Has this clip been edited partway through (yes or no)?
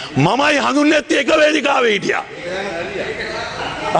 no